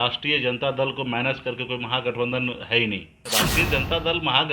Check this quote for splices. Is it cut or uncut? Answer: cut